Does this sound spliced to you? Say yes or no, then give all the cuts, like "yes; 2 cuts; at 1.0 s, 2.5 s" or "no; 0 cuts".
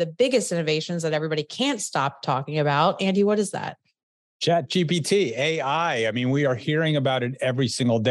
no; 0 cuts